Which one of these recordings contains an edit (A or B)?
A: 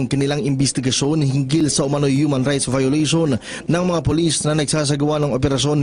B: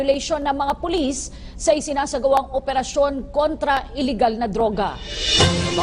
A